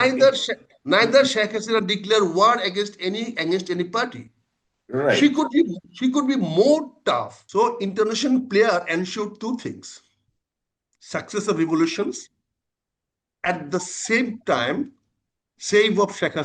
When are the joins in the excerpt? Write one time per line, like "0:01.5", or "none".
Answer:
0:07.4